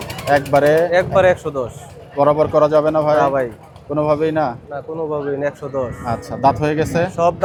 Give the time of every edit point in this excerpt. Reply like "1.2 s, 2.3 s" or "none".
none